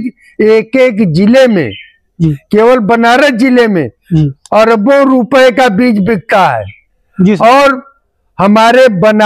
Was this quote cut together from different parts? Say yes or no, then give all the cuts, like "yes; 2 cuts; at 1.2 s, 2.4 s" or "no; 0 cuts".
no; 0 cuts